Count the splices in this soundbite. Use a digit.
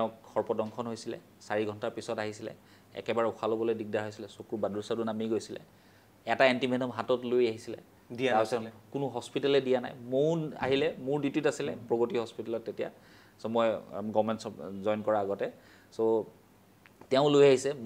0